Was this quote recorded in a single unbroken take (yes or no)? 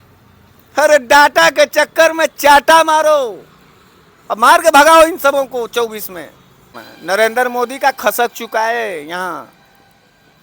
no